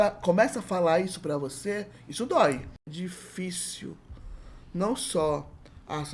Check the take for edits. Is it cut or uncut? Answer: cut